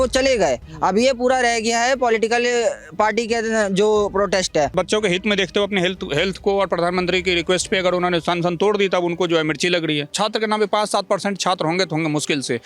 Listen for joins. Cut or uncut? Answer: cut